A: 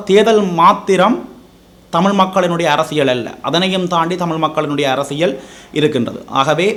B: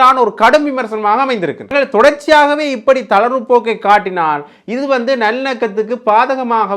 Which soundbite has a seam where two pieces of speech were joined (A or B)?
B